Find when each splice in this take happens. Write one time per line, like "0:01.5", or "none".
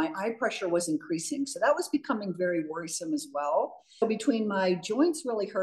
0:04.0